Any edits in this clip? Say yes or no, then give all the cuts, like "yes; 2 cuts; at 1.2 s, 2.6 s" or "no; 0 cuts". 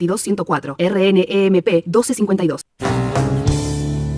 yes; 1 cut; at 2.7 s